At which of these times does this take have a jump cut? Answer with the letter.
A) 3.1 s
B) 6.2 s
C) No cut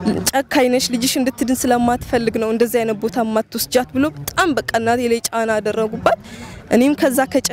C